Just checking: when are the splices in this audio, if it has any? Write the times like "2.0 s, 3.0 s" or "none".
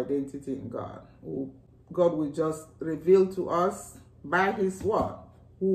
1.6 s